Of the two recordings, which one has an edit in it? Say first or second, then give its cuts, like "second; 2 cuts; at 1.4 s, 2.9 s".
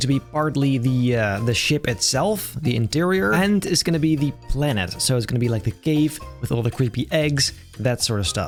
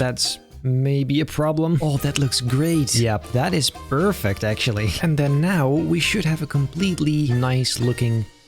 second; 2 cuts; at 1.8 s, 5.0 s